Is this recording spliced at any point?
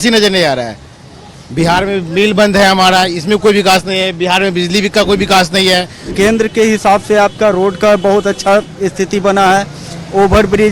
yes; 1 cut; at 6.1 s

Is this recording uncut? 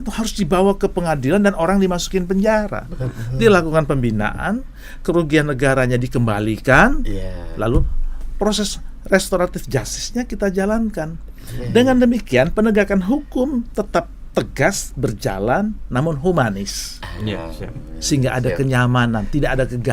yes; 0 cuts

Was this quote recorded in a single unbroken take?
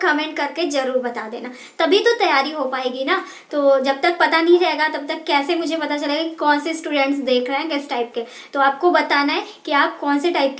yes; 0 cuts

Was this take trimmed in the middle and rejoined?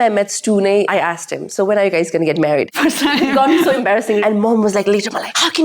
yes; 2 cuts; at 0.9 s, 4.2 s

